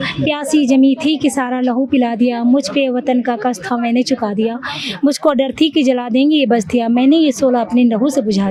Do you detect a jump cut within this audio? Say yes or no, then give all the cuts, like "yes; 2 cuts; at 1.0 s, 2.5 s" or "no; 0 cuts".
no; 0 cuts